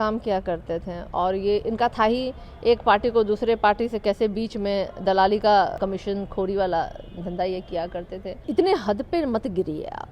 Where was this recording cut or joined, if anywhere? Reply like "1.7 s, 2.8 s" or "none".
5.8 s, 8.4 s